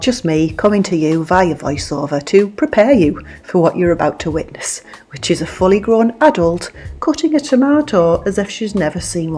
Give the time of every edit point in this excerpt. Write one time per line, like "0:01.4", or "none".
none